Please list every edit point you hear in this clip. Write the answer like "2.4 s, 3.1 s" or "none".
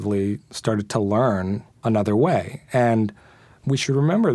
1.7 s, 3.4 s